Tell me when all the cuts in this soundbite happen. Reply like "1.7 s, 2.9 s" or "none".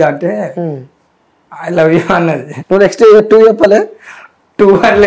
2.5 s